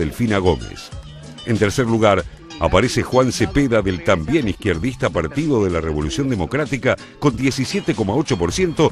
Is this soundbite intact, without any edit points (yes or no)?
no